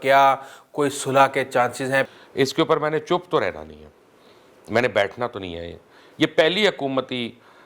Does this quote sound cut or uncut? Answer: cut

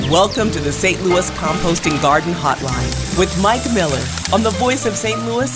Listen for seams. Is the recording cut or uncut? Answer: uncut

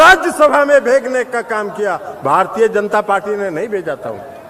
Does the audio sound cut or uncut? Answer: uncut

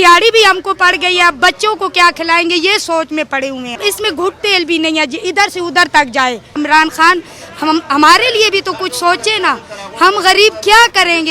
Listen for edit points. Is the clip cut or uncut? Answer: cut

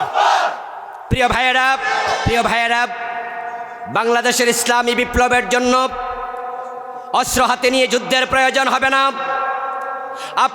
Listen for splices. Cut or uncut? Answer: cut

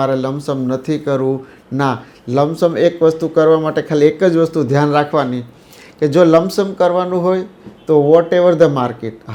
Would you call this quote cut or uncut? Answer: uncut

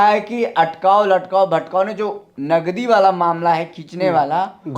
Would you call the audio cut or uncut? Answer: uncut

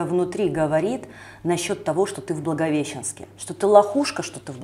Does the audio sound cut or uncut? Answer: uncut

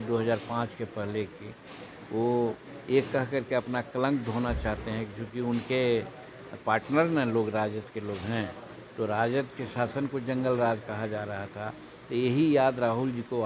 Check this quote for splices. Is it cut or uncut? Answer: uncut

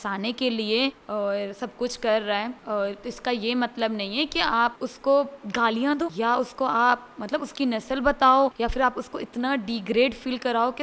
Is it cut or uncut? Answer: cut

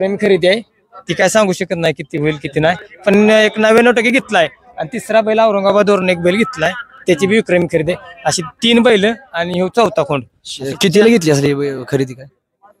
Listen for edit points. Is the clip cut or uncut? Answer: uncut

